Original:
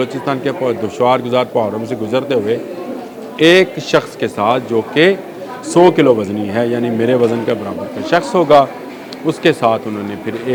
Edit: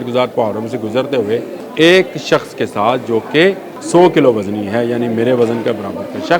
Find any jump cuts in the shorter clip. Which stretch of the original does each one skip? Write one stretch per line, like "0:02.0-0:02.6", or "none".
0:02.8-0:03.2
0:05.3-0:05.5